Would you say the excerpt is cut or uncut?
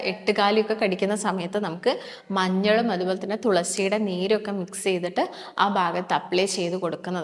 uncut